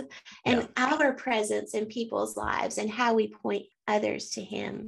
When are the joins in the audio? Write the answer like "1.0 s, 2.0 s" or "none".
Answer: 3.7 s